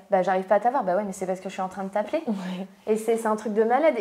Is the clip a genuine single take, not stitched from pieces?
yes; 0 cuts

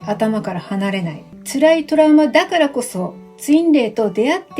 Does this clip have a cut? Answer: yes; 1 cut; at 1.4 s

